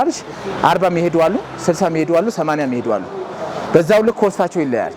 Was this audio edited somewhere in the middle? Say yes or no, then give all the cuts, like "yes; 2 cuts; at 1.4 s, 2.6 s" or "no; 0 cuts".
no; 0 cuts